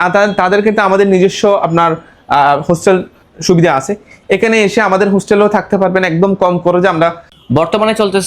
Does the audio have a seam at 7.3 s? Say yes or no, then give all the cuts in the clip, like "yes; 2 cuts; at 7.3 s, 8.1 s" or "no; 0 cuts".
yes; 1 cut; at 7.3 s